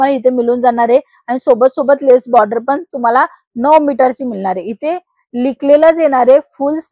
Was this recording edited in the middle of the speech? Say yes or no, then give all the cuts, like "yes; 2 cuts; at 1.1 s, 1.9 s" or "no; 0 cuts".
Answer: no; 0 cuts